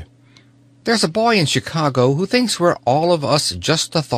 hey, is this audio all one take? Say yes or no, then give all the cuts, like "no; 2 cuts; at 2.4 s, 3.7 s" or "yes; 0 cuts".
no; 1 cut; at 2.8 s